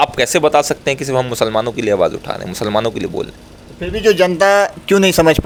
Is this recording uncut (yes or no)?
yes